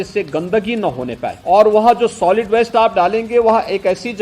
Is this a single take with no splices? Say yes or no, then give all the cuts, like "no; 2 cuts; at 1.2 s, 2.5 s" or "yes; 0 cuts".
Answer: no; 1 cut; at 1.4 s